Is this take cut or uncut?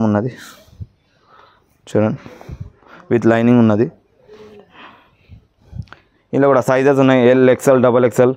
uncut